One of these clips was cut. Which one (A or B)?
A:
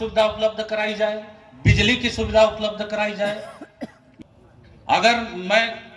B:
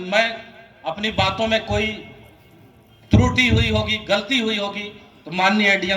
A